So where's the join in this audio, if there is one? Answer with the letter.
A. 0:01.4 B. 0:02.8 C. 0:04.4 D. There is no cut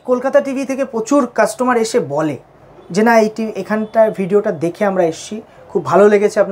D